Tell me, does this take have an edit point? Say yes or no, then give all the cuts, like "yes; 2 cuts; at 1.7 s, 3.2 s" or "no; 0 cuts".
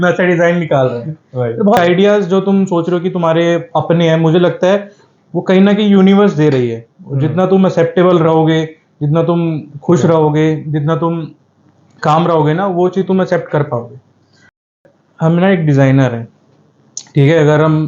yes; 2 cuts; at 1.8 s, 14.7 s